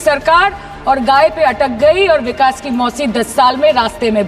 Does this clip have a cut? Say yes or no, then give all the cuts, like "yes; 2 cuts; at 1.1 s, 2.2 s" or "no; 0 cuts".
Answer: no; 0 cuts